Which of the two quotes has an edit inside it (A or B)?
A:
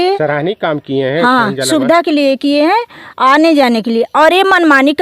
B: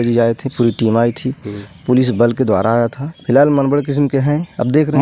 B